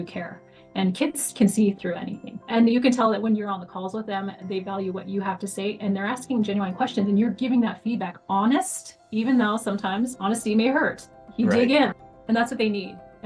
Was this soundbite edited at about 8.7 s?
no; 1 cut; at 2.4 s

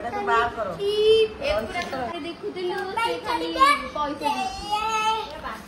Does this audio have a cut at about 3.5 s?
no; 1 cut; at 2.1 s

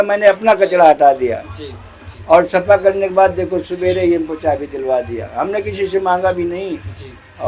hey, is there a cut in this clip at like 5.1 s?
no; 0 cuts

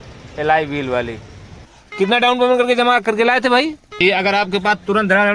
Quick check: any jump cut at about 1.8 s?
yes; 2 cuts; at 1.8 s, 4.0 s

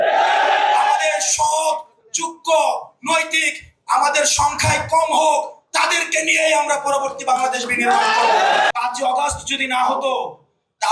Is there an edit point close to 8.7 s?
yes; 1 cut; at 8.7 s

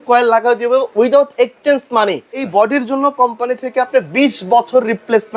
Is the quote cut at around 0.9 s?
yes; 2 cuts; at 0.9 s, 2.5 s

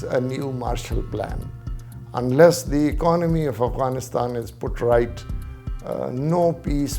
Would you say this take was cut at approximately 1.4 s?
no; 0 cuts

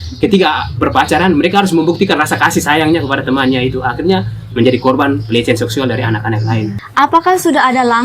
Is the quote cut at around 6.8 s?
yes; 1 cut; at 6.8 s

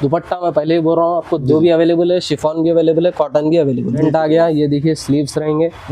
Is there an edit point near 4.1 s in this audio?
yes; 1 cut; at 4.1 s

